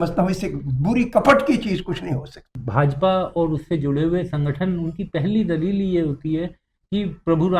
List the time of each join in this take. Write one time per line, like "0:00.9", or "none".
0:02.6